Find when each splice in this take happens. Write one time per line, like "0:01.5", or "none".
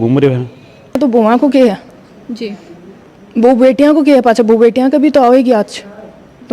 0:01.0

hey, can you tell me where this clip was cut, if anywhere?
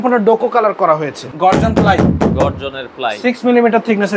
0:01.2

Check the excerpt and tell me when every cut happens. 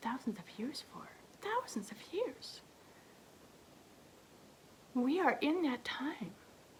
none

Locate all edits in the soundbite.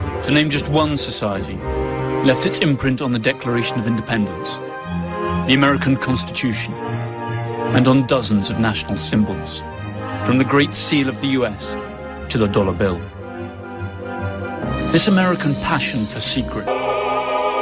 none

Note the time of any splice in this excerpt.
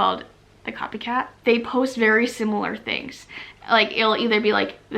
0:01.3

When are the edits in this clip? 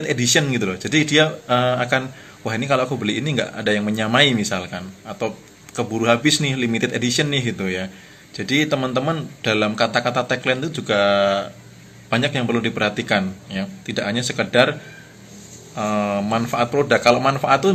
none

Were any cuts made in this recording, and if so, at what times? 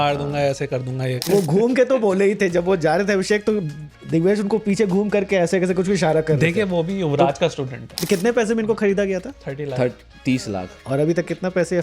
0:01.1
0:08.0

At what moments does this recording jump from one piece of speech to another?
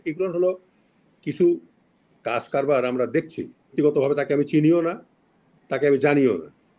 0:03.7

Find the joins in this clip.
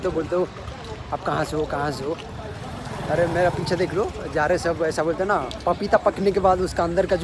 none

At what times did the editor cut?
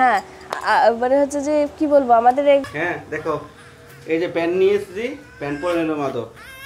0:02.6

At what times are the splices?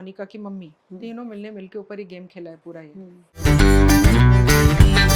0:03.2

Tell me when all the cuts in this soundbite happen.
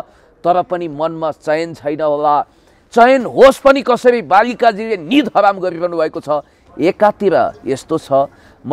none

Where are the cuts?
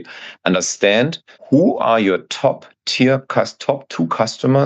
none

